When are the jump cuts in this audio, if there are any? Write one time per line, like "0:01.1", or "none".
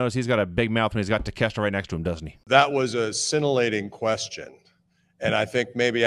0:02.4